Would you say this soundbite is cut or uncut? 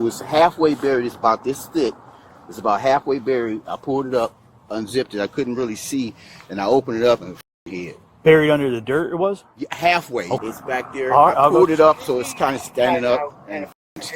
cut